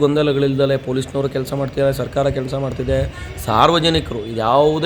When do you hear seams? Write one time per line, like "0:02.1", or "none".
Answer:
none